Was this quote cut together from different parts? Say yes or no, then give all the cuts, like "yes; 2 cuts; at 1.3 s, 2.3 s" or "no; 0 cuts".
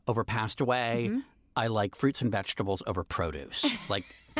no; 0 cuts